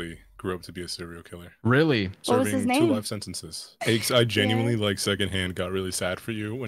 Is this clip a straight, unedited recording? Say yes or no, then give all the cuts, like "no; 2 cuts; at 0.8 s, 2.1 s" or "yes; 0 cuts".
no; 1 cut; at 3.7 s